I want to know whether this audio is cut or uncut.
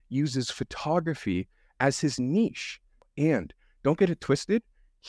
cut